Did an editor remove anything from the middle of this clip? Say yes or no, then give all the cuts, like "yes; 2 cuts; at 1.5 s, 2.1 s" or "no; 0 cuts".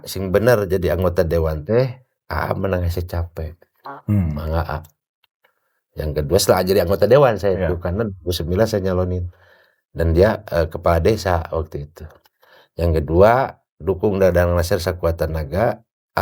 no; 0 cuts